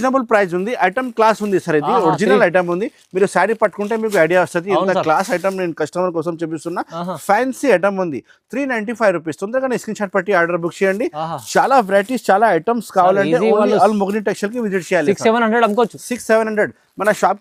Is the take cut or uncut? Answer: uncut